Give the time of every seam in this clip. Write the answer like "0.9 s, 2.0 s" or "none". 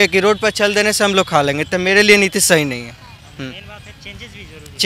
none